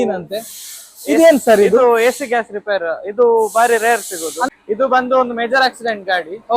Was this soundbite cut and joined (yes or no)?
yes